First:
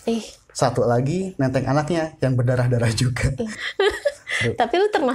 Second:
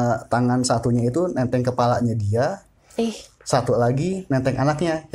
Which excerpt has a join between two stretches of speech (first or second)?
first